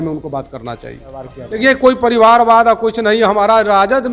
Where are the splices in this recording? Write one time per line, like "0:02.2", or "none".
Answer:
0:01.3